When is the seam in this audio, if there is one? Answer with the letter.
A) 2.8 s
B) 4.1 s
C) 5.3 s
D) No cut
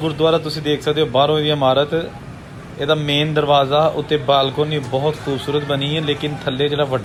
D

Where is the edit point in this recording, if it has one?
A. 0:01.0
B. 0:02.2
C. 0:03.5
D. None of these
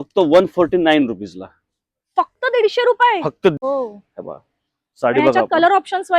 C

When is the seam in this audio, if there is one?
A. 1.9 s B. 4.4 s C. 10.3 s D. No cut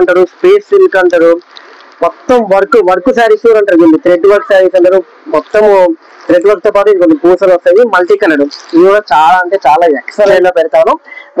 C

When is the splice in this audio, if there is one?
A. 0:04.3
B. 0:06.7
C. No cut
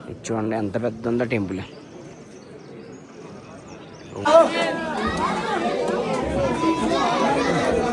A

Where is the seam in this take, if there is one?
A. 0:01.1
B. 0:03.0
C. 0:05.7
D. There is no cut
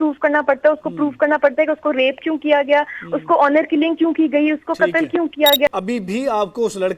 C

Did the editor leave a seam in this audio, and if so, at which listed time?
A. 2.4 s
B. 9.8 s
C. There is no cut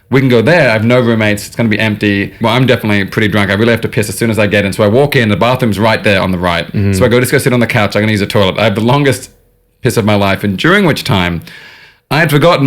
A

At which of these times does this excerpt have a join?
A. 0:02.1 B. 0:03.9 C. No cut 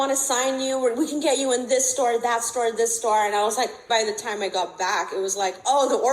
B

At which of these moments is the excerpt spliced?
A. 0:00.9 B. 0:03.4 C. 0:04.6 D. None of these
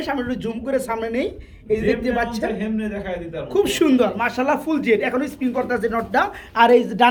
D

